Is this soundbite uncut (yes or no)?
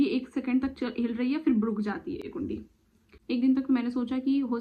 yes